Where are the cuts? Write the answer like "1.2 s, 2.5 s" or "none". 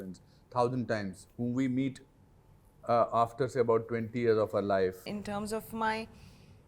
5.1 s